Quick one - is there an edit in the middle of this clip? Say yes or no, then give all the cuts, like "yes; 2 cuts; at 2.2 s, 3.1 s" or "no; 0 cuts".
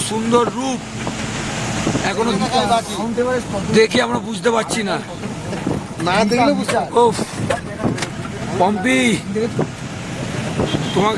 no; 0 cuts